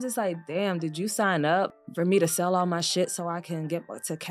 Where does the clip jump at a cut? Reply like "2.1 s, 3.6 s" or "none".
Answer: 1.8 s